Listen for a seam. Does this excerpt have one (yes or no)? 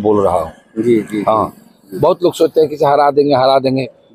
no